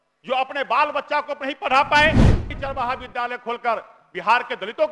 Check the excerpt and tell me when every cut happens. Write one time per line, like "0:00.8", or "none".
0:02.5